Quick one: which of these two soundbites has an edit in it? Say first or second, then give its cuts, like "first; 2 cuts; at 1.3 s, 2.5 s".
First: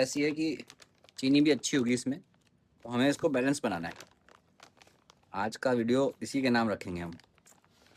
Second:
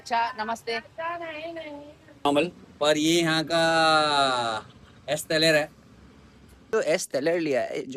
second; 2 cuts; at 2.2 s, 6.7 s